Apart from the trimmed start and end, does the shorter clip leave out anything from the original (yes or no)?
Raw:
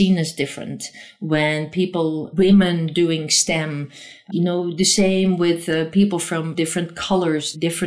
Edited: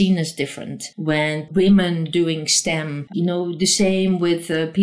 yes